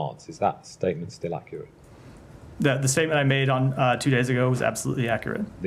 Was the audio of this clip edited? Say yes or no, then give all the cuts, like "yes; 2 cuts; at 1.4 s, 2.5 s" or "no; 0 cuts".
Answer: no; 0 cuts